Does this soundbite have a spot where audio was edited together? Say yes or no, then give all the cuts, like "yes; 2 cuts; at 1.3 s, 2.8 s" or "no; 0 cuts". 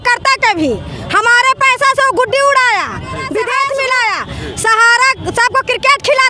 yes; 1 cut; at 3.6 s